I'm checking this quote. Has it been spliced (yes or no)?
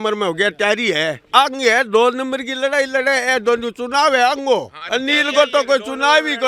no